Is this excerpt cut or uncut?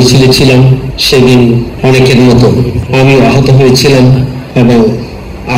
cut